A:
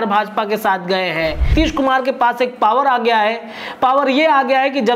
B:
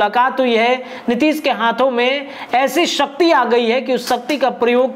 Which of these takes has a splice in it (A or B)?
A